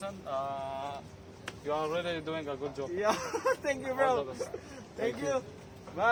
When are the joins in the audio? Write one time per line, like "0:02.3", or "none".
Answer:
none

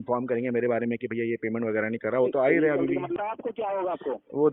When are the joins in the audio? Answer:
0:03.2

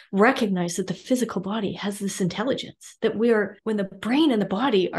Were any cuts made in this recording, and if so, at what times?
0:03.6

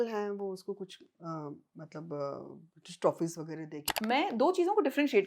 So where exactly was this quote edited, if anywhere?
0:03.9

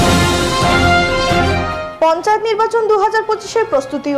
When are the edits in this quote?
0:01.5

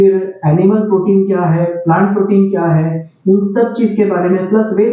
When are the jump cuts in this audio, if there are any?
none

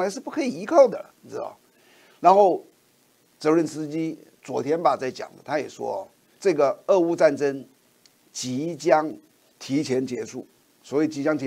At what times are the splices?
0:06.2

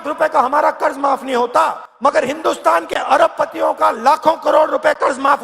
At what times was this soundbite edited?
0:01.9

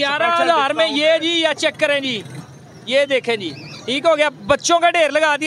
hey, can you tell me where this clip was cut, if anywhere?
none

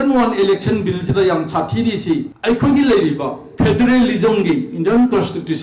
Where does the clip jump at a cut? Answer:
0:02.3

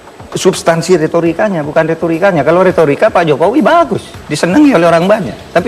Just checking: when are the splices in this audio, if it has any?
none

